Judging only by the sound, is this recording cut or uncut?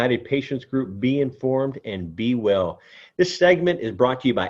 uncut